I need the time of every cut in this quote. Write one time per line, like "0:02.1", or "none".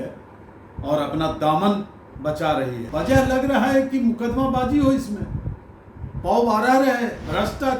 0:02.8